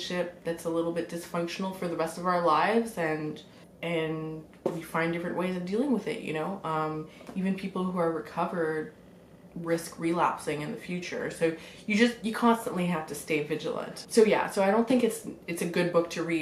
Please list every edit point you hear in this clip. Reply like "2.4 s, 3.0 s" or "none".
none